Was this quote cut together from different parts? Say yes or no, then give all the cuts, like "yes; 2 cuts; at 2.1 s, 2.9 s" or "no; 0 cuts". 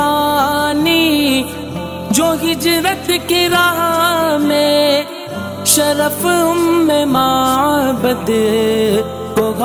no; 0 cuts